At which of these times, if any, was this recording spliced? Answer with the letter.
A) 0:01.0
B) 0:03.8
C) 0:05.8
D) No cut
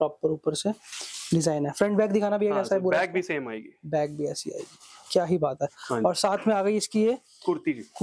D